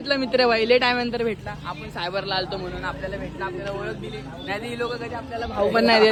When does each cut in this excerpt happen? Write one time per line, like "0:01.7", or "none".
none